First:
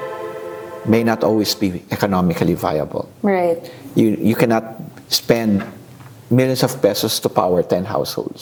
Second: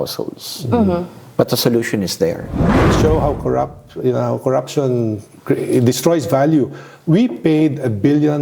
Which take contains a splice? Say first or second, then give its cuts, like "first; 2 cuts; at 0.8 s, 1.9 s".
second; 1 cut; at 2.8 s